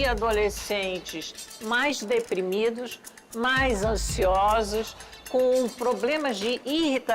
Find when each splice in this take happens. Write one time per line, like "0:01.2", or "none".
none